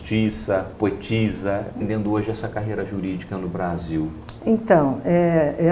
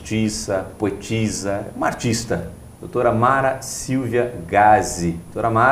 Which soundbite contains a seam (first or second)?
second